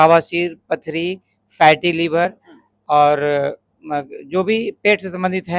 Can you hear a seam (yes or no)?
no